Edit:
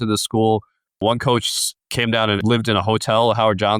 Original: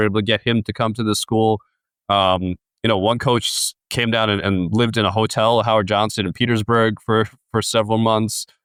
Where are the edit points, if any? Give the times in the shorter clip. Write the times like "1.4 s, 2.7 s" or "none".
1.0 s, 2.4 s